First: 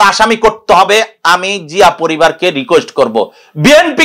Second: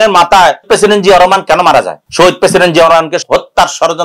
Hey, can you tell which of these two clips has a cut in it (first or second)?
second